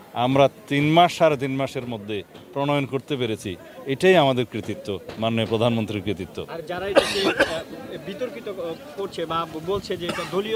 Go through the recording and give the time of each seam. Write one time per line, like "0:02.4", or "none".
none

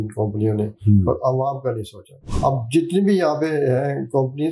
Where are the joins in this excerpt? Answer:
0:02.2

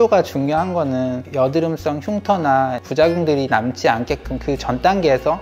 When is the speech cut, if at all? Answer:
none

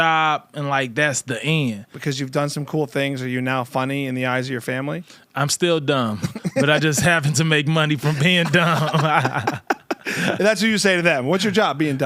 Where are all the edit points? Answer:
0:01.9

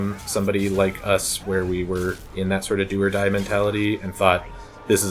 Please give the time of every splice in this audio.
none

